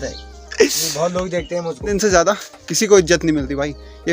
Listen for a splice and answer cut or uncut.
cut